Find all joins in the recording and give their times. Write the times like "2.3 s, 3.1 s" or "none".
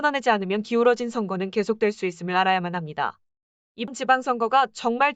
3.9 s